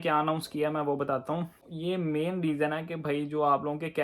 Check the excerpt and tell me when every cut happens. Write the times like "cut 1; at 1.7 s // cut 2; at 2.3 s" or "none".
cut 1; at 1.7 s